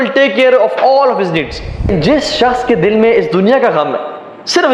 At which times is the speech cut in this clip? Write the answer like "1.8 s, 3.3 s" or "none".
1.9 s

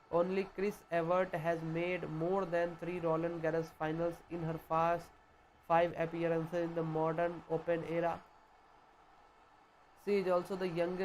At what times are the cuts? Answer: 8.2 s, 10.0 s

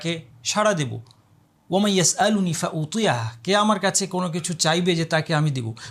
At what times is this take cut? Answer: none

